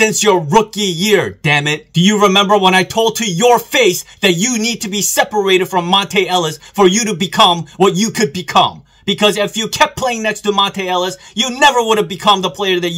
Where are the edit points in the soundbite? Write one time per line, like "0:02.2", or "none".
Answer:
0:01.8